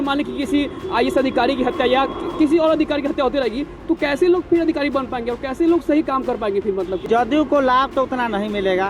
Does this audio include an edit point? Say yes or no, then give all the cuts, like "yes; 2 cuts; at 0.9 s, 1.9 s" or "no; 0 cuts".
yes; 1 cut; at 7.0 s